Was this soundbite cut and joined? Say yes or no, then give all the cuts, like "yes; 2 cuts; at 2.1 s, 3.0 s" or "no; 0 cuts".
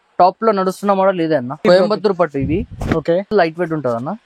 yes; 2 cuts; at 1.6 s, 3.3 s